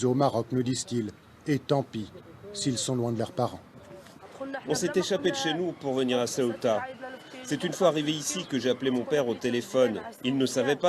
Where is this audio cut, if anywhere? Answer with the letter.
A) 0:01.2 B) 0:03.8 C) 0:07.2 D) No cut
A